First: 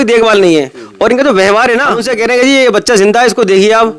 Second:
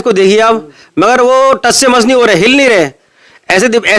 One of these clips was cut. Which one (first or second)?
first